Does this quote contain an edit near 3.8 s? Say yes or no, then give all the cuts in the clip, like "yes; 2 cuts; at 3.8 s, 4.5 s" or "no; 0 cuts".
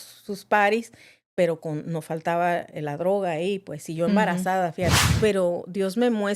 no; 1 cut; at 5.0 s